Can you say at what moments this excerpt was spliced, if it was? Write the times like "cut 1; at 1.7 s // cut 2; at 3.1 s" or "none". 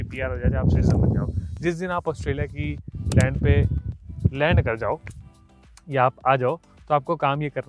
none